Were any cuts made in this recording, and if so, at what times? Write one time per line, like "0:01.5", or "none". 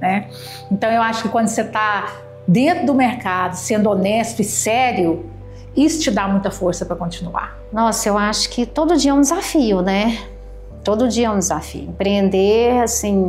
0:07.6